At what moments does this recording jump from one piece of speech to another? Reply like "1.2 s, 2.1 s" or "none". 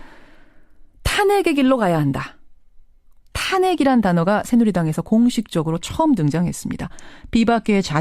1.0 s